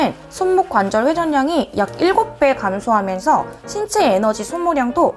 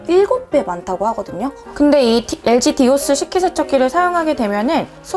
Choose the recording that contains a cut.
second; 1 cut; at 1.6 s

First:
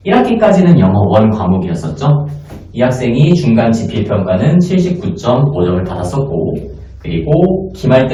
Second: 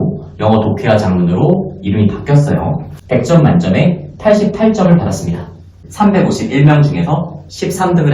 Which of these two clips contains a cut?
second; 2 cuts; at 2.9 s, 5.8 s

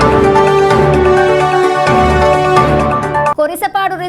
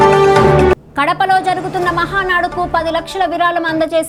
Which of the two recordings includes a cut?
first; 1 cut; at 1.0 s

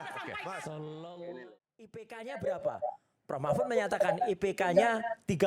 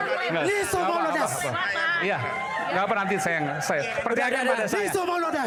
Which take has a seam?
first; 1 cut; at 1.6 s

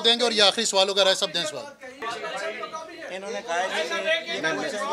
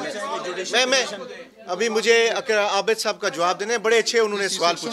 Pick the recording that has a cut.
first; 1 cut; at 2.0 s

